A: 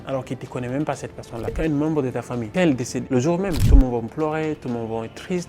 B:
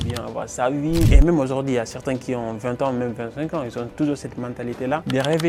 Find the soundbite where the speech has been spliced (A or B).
A